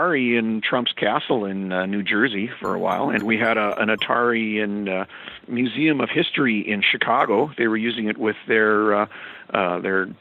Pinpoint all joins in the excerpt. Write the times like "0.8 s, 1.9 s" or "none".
3.2 s, 5.3 s